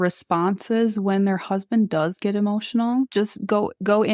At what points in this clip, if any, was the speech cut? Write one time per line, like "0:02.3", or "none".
0:03.1